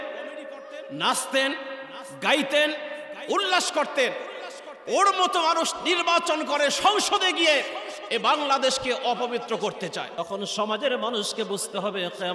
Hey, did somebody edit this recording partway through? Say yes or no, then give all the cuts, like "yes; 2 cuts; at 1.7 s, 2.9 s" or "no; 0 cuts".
yes; 1 cut; at 10.2 s